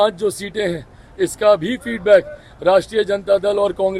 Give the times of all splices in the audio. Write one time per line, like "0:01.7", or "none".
none